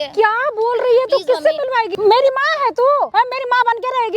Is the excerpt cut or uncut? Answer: cut